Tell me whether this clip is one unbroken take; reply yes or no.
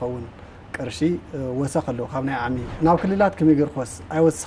no